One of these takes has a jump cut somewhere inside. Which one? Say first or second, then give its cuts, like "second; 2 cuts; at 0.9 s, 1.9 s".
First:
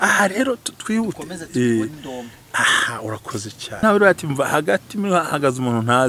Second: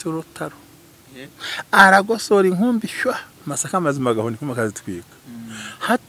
first; 1 cut; at 3.8 s